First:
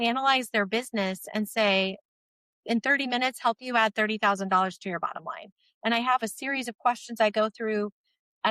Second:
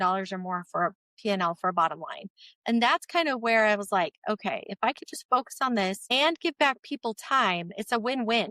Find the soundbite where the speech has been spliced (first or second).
second